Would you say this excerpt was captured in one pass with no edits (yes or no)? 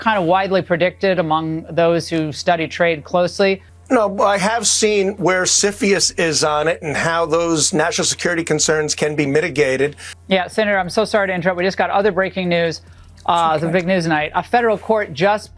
yes